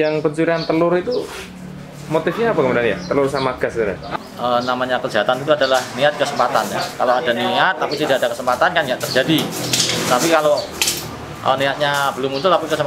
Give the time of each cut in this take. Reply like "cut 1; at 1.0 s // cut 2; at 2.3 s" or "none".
cut 1; at 4.1 s